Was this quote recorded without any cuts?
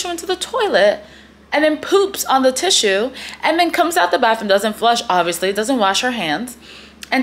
yes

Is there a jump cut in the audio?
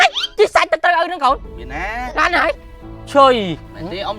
yes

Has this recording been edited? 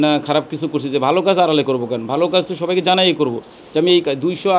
no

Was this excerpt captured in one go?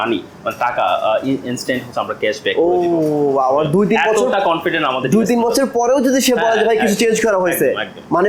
yes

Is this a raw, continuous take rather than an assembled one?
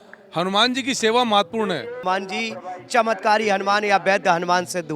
no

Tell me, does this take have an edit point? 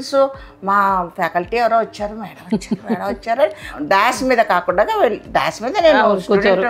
yes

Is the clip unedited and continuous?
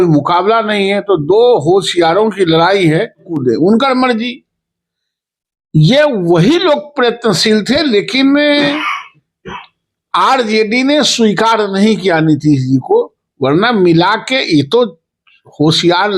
no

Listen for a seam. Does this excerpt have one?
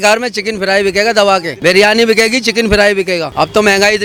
no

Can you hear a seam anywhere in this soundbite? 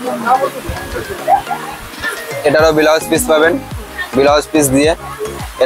no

